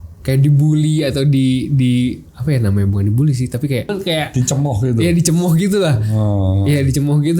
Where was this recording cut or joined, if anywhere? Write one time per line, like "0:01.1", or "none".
0:03.9